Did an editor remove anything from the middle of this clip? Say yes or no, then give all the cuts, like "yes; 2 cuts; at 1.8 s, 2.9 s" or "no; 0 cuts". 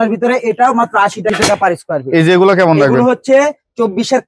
yes; 1 cut; at 1.3 s